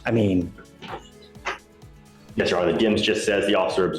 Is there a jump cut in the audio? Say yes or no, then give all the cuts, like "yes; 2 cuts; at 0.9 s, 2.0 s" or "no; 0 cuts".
no; 0 cuts